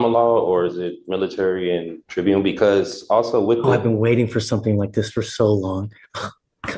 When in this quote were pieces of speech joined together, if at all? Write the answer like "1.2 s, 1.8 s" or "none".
2.0 s

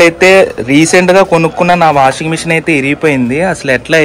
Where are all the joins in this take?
none

